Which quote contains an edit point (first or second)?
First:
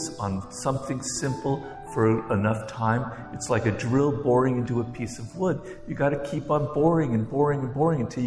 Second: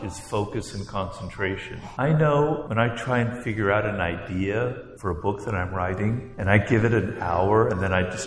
second